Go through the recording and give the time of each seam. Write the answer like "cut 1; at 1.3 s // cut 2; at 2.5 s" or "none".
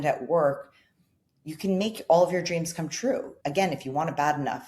cut 1; at 3.4 s